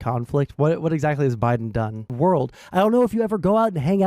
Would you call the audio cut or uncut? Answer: cut